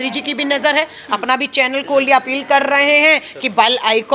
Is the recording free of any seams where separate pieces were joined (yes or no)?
yes